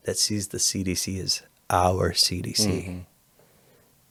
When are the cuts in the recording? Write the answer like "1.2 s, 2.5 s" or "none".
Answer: none